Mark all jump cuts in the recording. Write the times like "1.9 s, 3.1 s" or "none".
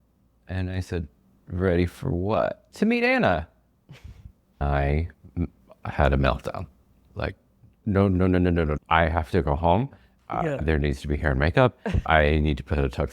2.6 s, 4.6 s, 7.8 s, 8.8 s, 10.6 s, 12.1 s